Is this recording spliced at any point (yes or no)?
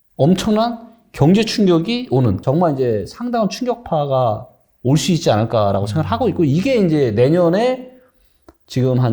yes